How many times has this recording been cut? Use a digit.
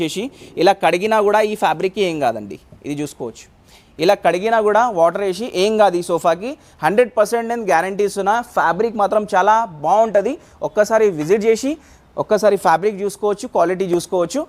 0